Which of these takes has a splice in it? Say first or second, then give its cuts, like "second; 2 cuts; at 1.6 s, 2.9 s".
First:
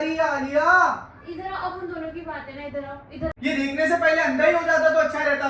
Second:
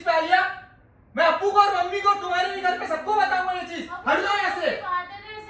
first; 1 cut; at 3.3 s